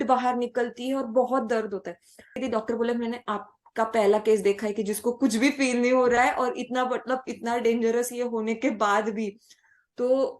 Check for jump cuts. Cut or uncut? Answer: cut